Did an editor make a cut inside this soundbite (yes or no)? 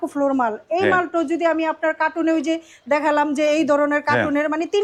no